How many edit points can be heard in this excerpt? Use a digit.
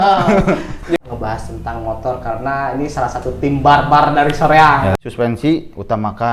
2